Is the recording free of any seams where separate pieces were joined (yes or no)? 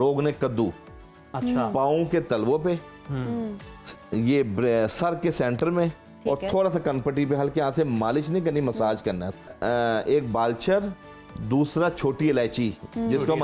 no